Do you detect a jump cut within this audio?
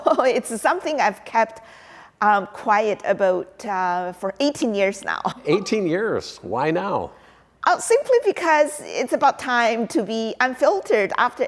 no; 0 cuts

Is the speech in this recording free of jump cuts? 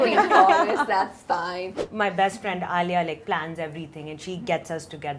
no; 1 cut; at 1.8 s

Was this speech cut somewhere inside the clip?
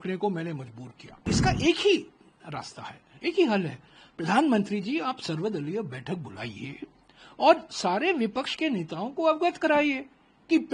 yes; 1 cut; at 1.2 s

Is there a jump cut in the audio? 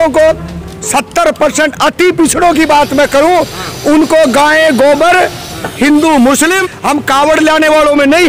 yes; 1 cut; at 6.6 s

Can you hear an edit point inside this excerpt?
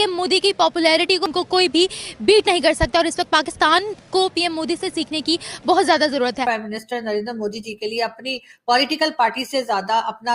yes; 1 cut; at 6.4 s

